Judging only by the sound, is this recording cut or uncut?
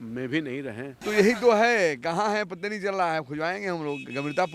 cut